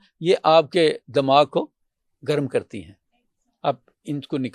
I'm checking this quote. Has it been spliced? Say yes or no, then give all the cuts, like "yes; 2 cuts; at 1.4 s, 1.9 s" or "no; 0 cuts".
no; 0 cuts